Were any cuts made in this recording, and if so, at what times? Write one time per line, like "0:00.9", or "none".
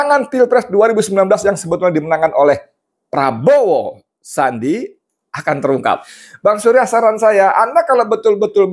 0:06.1